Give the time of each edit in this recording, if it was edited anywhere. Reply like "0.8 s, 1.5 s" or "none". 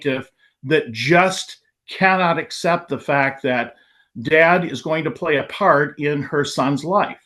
none